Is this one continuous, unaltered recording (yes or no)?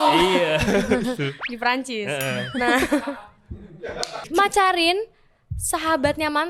no